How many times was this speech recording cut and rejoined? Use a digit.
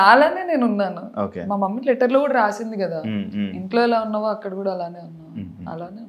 0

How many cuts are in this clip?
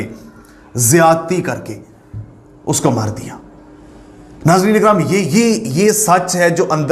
0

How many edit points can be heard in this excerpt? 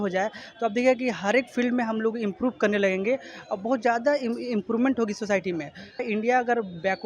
1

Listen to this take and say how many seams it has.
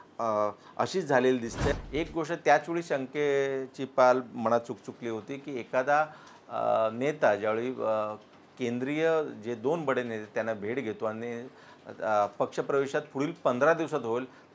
1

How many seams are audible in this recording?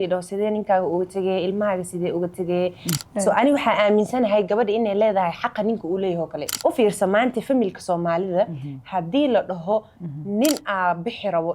2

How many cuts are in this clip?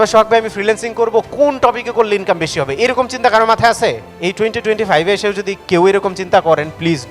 1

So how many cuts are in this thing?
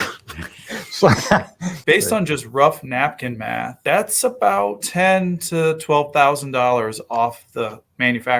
3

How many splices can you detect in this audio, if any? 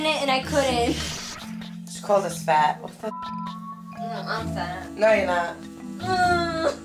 1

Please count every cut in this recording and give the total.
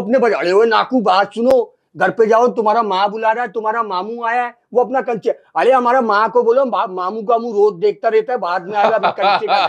0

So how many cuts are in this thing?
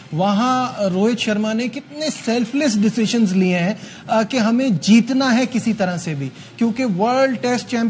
0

